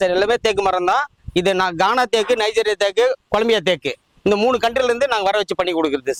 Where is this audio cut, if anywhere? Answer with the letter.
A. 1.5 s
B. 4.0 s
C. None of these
C